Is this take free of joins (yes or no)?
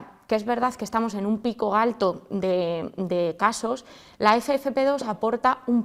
yes